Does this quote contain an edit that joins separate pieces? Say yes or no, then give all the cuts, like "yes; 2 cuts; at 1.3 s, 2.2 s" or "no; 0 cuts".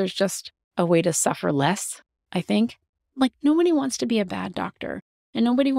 yes; 1 cut; at 3.0 s